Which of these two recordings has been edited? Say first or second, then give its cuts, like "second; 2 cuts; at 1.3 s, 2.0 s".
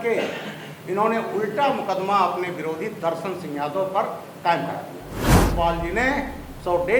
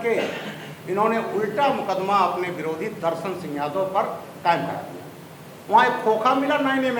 first; 1 cut; at 5.4 s